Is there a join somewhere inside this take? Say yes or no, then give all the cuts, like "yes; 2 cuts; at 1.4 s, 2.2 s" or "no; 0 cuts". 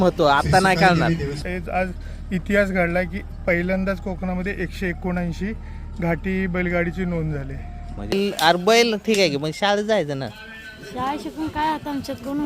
yes; 2 cuts; at 1.4 s, 8.1 s